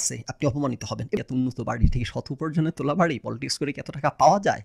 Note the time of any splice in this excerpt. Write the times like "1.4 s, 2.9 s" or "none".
1.2 s